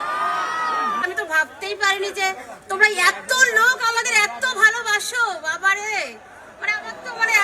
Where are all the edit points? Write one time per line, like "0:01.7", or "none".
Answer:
0:01.0